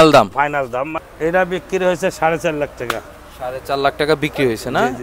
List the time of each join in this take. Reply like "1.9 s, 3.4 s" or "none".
1.0 s